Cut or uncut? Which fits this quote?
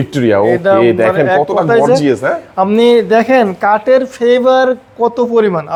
uncut